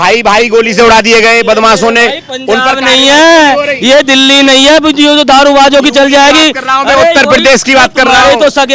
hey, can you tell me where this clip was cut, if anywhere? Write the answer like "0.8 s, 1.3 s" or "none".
none